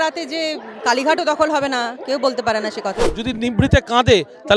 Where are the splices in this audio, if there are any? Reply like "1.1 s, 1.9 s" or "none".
3.2 s